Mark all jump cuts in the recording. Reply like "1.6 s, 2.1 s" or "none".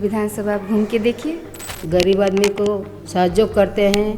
1.7 s